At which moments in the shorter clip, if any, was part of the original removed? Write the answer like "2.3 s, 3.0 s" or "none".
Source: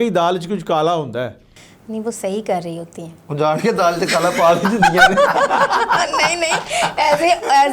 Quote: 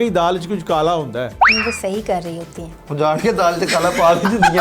1.4 s